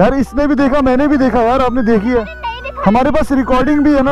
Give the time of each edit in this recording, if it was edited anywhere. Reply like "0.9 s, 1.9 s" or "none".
none